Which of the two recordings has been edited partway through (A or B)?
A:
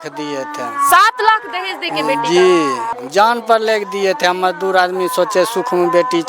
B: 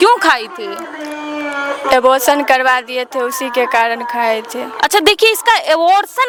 A